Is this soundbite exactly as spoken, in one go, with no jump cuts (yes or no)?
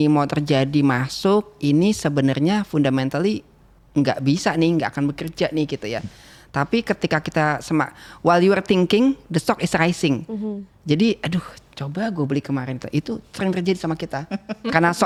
yes